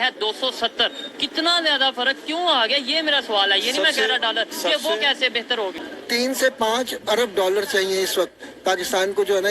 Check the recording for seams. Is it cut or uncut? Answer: cut